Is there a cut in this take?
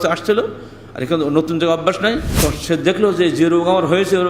yes; 1 cut; at 2.3 s

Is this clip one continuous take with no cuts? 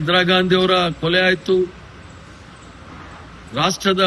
yes; 0 cuts

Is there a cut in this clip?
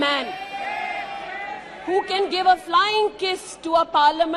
no; 0 cuts

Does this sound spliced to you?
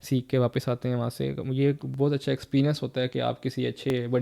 no; 0 cuts

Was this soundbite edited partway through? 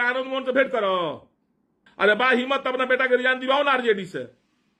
yes; 1 cut; at 1.8 s

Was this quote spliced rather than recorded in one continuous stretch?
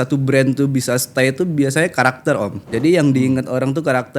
yes; 1 cut; at 2.6 s

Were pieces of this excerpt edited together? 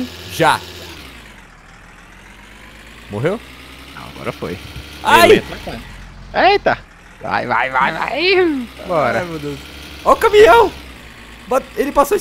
yes; 1 cut; at 6.9 s

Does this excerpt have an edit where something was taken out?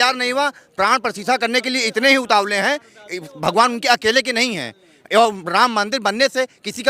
no; 0 cuts

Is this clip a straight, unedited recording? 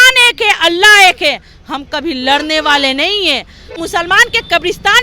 no; 1 cut; at 3.7 s

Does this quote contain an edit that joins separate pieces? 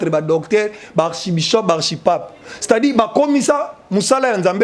no; 0 cuts

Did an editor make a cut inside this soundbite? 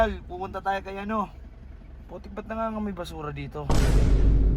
yes; 1 cut; at 3.7 s

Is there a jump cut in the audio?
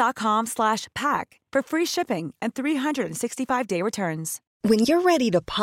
yes; 1 cut; at 4.4 s

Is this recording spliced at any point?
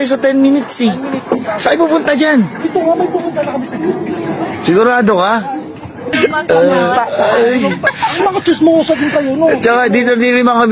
yes; 1 cut; at 6.1 s

